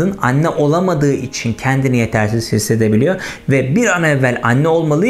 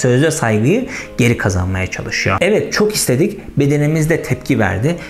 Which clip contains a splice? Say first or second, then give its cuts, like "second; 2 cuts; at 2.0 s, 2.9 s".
second; 1 cut; at 2.4 s